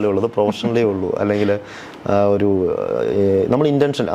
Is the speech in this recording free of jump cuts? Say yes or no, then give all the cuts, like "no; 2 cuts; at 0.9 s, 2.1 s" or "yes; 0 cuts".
yes; 0 cuts